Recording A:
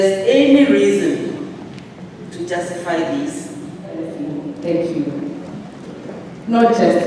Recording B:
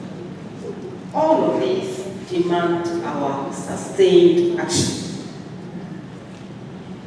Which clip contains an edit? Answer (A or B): A